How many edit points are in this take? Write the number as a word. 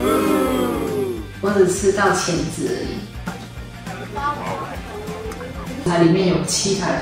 one